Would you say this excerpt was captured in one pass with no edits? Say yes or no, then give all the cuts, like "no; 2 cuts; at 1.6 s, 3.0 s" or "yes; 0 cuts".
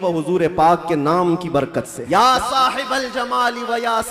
no; 1 cut; at 2.0 s